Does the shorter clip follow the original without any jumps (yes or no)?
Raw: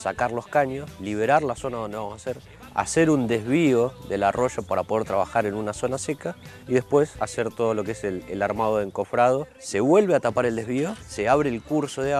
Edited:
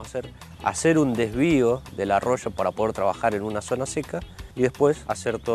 yes